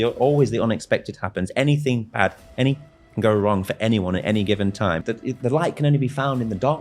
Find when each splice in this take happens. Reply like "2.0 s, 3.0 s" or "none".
5.1 s